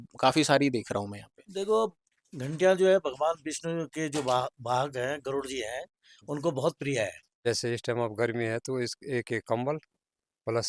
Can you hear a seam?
yes; 1 cut; at 7.3 s

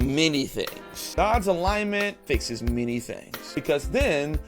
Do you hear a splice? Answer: yes; 3 cuts; at 1.2 s, 2.2 s, 3.6 s

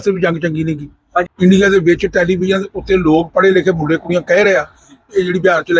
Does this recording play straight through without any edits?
no; 1 cut; at 1.3 s

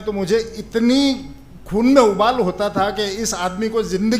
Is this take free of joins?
yes; 0 cuts

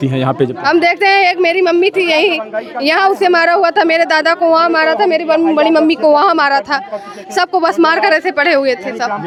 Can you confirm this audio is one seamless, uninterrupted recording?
yes; 0 cuts

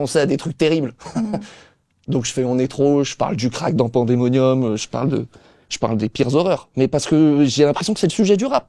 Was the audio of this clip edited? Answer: no; 0 cuts

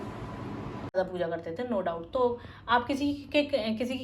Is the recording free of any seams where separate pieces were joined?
no; 1 cut; at 0.9 s

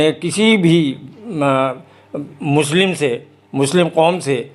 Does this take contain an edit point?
no; 0 cuts

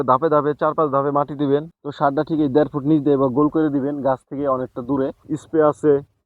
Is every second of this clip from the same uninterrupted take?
no; 2 cuts; at 1.7 s, 5.3 s

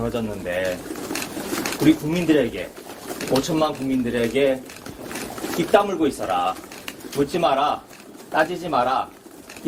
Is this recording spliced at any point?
no; 0 cuts

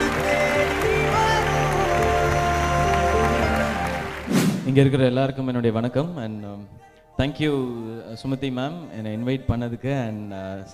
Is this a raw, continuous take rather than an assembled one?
yes; 0 cuts

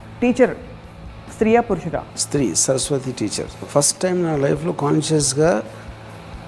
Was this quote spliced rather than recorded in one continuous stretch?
yes; 2 cuts; at 2.2 s, 3.6 s

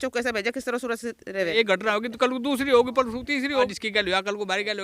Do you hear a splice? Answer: yes; 2 cuts; at 1.5 s, 3.8 s

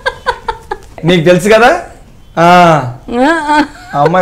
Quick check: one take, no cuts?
no; 1 cut; at 1.0 s

